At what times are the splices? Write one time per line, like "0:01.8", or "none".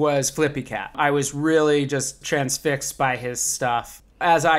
0:00.9
0:02.2
0:03.7